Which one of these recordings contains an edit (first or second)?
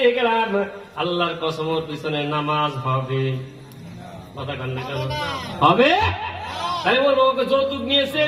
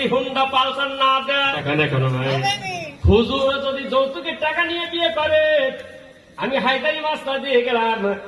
second